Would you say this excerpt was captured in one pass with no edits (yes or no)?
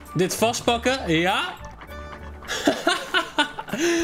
yes